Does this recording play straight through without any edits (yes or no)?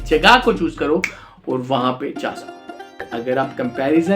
no